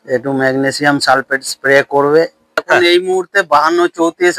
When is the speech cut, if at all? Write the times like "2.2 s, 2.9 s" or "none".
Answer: 2.6 s

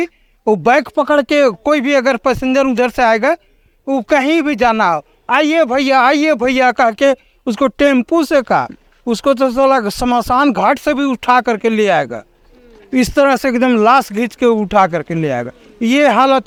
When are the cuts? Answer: none

